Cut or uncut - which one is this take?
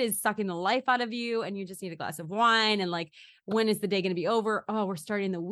uncut